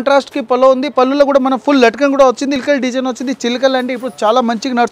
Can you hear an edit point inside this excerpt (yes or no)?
yes